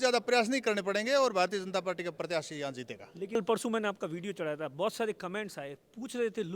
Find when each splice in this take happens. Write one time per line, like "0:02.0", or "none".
0:03.4